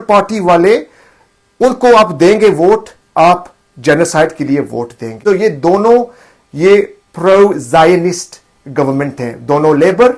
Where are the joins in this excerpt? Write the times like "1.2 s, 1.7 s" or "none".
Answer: none